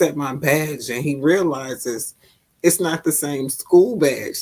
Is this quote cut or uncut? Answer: uncut